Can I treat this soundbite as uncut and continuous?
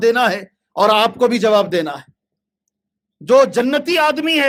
yes; 0 cuts

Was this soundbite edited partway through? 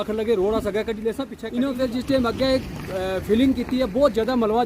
yes; 1 cut; at 1.3 s

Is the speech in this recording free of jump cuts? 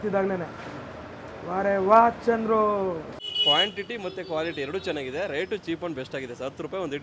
no; 1 cut; at 3.2 s

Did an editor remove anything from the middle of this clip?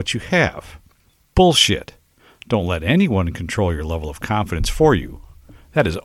no; 0 cuts

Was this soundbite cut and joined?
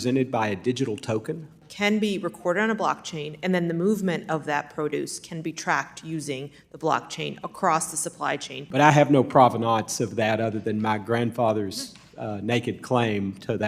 yes; 2 cuts; at 1.6 s, 8.5 s

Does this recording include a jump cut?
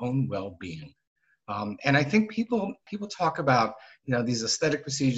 yes; 1 cut; at 2.9 s

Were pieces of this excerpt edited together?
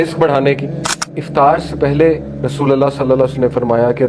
yes; 1 cut; at 1.1 s

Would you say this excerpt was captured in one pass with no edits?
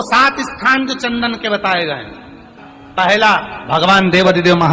no; 1 cut; at 3.6 s

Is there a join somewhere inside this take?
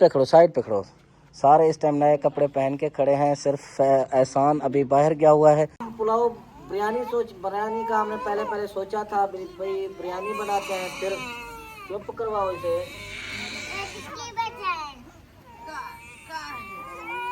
yes; 1 cut; at 5.8 s

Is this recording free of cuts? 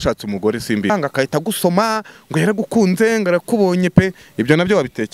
no; 1 cut; at 0.9 s

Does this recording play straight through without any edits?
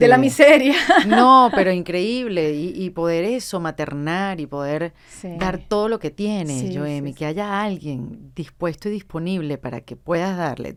yes; 0 cuts

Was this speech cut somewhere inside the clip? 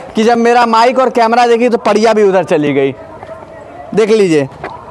no; 0 cuts

